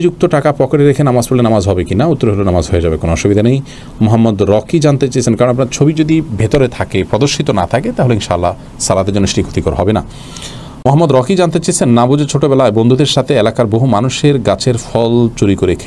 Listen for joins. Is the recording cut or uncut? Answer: uncut